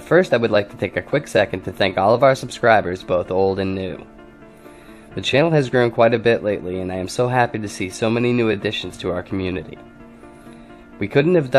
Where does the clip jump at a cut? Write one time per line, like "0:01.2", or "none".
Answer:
0:07.5